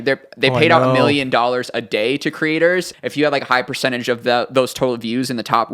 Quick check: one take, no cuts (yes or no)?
no